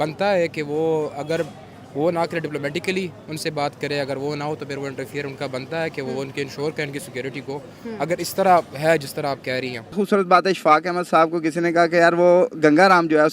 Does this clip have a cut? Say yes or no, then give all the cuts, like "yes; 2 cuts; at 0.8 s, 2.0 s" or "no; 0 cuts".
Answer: yes; 1 cut; at 10.0 s